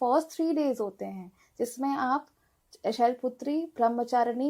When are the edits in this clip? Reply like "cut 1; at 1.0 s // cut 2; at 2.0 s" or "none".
none